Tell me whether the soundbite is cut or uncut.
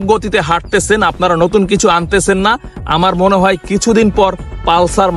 uncut